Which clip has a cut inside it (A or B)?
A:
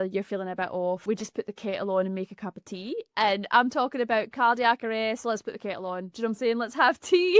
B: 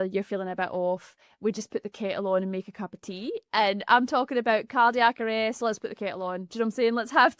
A